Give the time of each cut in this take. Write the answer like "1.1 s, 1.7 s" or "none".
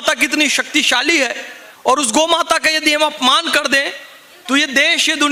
none